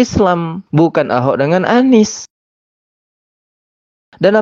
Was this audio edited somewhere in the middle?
no; 0 cuts

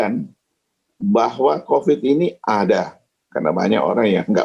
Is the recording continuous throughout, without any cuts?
yes; 0 cuts

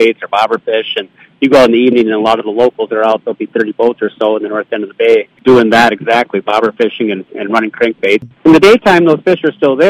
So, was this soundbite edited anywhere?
yes; 2 cuts; at 5.3 s, 8.3 s

